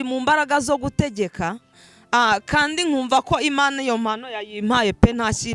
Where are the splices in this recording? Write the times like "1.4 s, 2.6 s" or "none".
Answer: none